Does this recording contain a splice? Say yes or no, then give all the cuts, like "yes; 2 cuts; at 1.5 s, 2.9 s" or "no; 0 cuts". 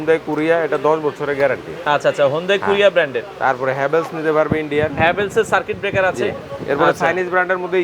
no; 0 cuts